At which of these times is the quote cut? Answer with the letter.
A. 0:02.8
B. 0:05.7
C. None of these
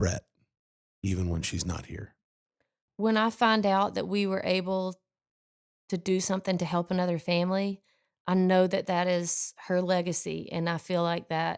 A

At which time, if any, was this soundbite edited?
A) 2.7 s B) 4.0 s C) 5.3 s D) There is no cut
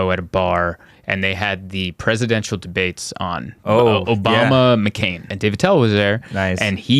C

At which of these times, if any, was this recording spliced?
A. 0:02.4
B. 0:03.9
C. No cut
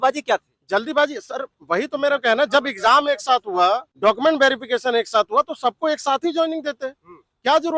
B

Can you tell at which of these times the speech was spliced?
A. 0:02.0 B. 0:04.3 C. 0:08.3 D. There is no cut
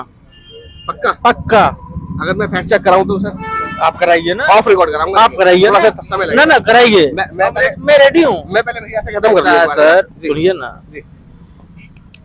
D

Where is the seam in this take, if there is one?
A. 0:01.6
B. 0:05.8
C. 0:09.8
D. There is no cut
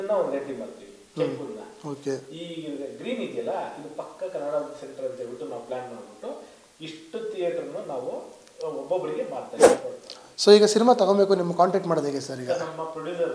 C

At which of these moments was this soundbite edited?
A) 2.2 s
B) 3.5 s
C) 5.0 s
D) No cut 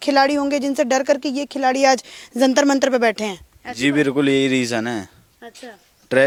D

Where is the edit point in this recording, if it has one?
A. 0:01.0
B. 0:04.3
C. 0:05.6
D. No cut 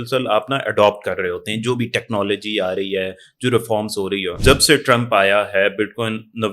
B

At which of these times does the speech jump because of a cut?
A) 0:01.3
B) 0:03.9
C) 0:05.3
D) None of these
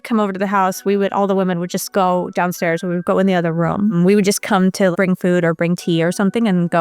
B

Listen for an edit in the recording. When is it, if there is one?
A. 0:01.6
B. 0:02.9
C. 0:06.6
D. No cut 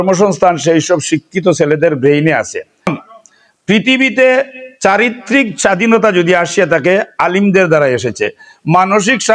B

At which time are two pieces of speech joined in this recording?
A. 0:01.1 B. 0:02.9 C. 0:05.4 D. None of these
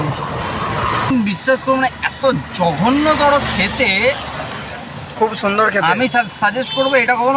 A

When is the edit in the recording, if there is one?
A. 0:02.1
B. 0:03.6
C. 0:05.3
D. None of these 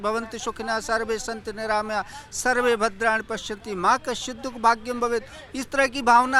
D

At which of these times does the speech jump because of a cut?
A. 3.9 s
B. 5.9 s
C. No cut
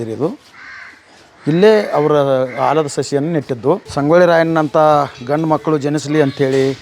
A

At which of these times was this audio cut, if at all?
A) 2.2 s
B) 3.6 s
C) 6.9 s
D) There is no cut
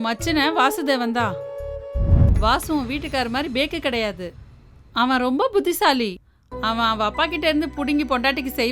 A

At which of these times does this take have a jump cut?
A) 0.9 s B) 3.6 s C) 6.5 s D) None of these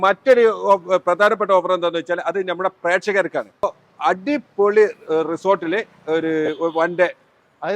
B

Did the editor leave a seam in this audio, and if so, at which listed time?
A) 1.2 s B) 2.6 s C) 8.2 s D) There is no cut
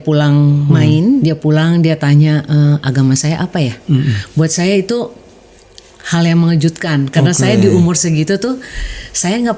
A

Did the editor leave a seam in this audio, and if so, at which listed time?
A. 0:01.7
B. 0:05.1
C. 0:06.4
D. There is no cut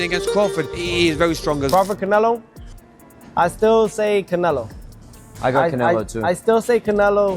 A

